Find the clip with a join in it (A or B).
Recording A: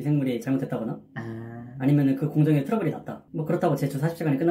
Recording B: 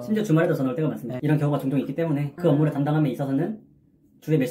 B